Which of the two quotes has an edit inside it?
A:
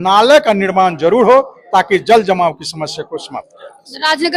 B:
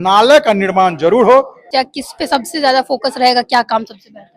B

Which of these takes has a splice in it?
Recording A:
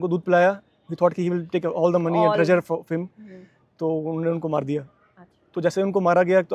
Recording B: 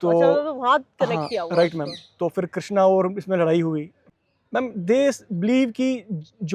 B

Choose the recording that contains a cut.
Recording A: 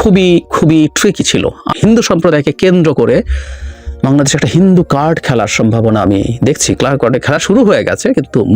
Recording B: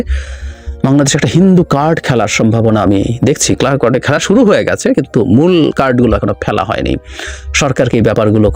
A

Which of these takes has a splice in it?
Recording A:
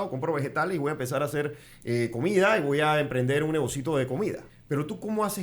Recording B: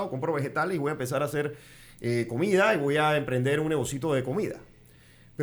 A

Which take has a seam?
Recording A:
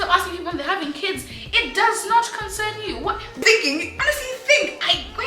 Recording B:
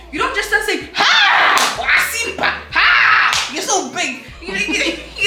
A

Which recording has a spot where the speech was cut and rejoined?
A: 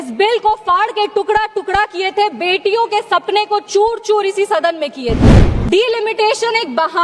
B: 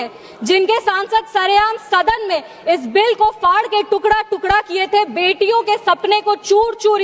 A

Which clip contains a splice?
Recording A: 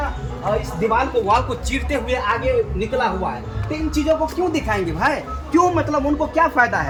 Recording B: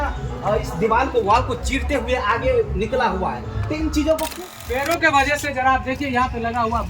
B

